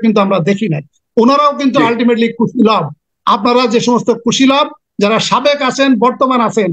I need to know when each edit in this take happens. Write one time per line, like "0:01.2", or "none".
0:03.0